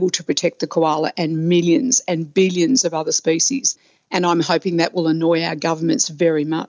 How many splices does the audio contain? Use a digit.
1